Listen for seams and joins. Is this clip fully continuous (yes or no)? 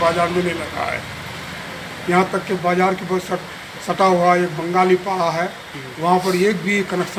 yes